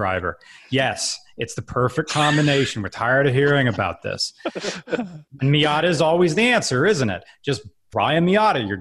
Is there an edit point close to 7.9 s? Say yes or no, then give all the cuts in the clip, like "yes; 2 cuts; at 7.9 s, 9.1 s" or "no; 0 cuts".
yes; 1 cut; at 7.9 s